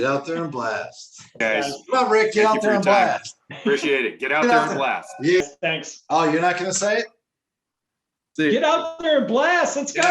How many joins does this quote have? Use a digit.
2